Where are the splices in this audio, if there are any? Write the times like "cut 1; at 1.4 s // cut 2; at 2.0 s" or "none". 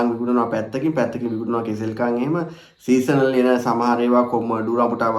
none

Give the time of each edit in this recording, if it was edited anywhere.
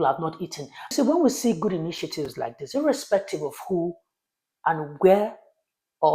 cut 1; at 0.9 s

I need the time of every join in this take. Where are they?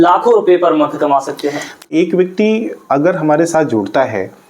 cut 1; at 1.9 s

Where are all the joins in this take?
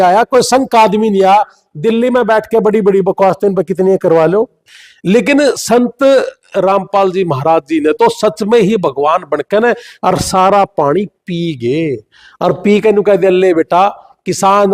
cut 1; at 4.6 s

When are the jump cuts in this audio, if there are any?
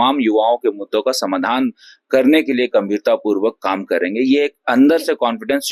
none

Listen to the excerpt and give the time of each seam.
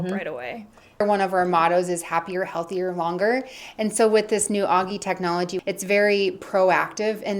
cut 1; at 1.0 s // cut 2; at 5.5 s

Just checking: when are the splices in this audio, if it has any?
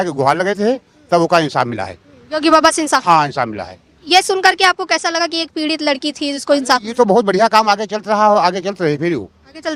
none

